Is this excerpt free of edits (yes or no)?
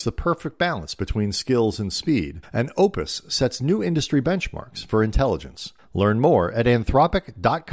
yes